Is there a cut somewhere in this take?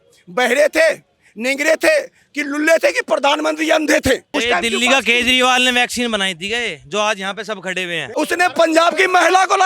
yes; 2 cuts; at 4.3 s, 8.0 s

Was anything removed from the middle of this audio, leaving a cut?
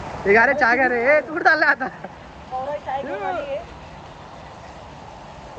no; 0 cuts

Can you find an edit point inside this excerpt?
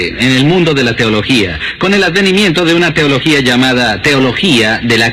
yes; 1 cut; at 3.9 s

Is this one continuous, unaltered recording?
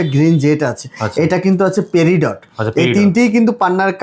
yes; 0 cuts

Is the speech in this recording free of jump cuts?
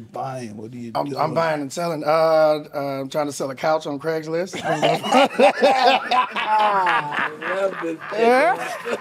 no; 1 cut; at 8.0 s

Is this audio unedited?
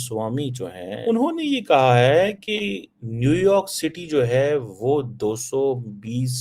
no; 1 cut; at 1.0 s

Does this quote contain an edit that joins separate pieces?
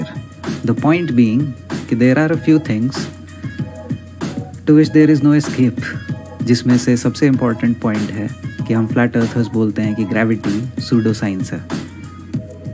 yes; 1 cut; at 1.2 s

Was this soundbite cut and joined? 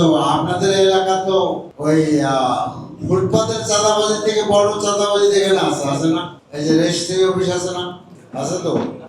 no; 0 cuts

